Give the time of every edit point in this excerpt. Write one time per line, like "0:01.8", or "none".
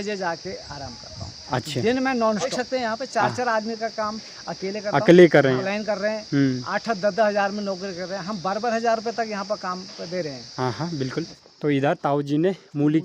0:02.5
0:05.7
0:11.4